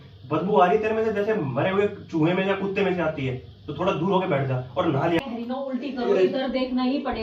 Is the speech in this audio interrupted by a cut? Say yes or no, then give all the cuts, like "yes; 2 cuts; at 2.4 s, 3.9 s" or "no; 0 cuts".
yes; 1 cut; at 5.2 s